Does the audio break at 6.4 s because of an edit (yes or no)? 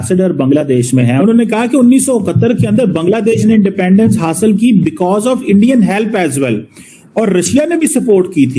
no